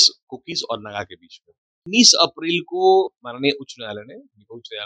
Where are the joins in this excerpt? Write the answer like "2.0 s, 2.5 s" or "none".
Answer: 1.8 s